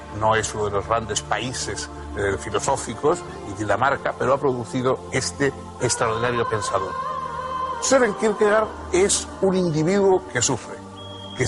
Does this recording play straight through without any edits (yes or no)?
no